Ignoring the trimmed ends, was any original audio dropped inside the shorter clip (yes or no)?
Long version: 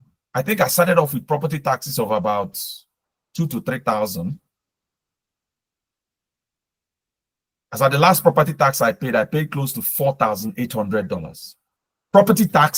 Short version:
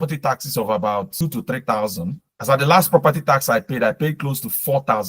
yes